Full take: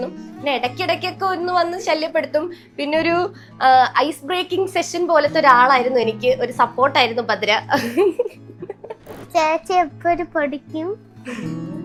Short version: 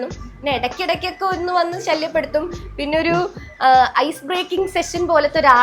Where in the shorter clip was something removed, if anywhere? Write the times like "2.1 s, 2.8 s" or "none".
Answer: none